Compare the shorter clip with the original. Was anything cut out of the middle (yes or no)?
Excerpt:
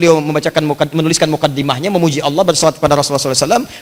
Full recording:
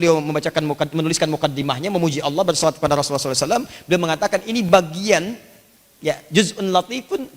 no